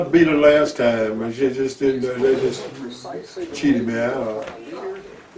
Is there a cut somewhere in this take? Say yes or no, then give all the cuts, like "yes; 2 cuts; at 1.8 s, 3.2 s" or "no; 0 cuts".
no; 0 cuts